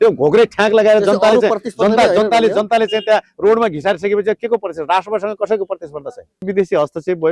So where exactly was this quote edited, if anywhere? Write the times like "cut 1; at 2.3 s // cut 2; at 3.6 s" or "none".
cut 1; at 6.4 s